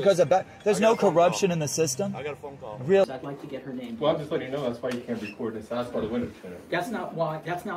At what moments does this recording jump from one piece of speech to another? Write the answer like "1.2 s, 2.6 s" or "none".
3.0 s